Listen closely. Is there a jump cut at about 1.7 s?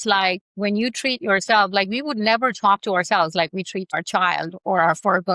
no; 1 cut; at 4.0 s

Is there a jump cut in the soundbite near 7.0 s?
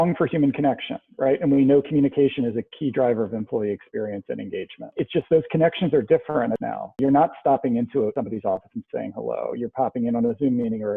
yes; 3 cuts; at 4.9 s, 7.0 s, 8.1 s

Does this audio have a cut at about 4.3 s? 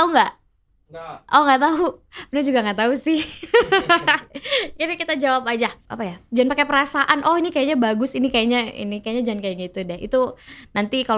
no; 1 cut; at 5.8 s

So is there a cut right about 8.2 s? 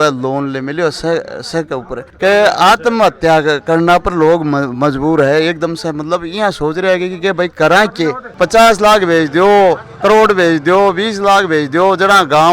yes; 2 cuts; at 2.0 s, 8.2 s

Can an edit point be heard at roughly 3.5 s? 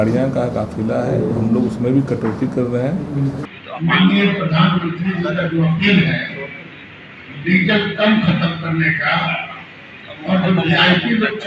yes; 1 cut; at 3.5 s

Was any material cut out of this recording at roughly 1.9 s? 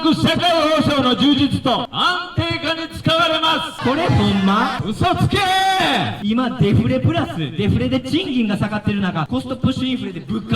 yes; 5 cuts; at 1.9 s, 3.7 s, 4.8 s, 6.1 s, 9.3 s

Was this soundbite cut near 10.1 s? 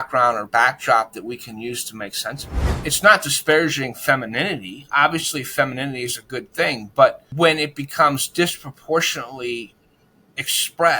no; 2 cuts; at 2.8 s, 7.2 s

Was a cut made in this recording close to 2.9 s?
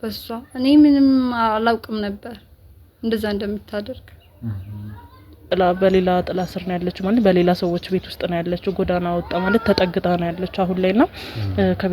no; 1 cut; at 5.4 s

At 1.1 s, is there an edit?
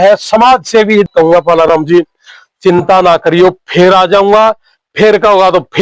yes; 1 cut; at 1.1 s

